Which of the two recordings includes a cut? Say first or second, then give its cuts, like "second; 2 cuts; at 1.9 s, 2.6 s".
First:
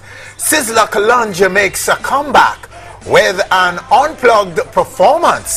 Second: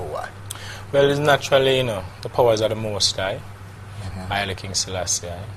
second; 1 cut; at 4.6 s